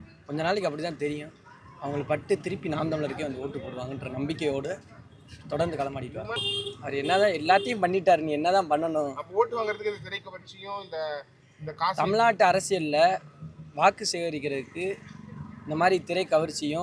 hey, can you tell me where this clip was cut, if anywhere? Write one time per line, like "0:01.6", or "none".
0:06.3